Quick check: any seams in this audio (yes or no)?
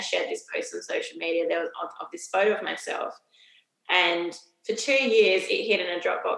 no